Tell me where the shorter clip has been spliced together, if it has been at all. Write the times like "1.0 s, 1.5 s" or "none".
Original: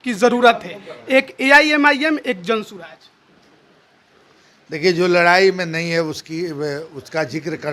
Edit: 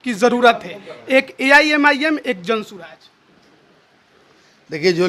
none